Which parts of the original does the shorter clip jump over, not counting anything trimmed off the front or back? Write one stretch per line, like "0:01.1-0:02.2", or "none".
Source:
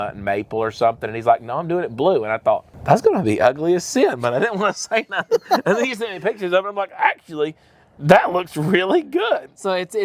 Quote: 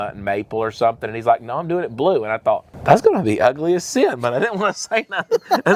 none